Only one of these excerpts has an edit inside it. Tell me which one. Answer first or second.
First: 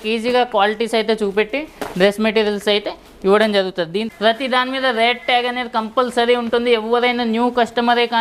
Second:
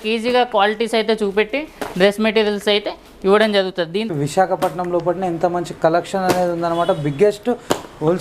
second